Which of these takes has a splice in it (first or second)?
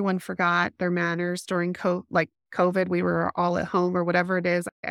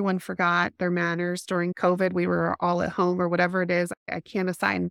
second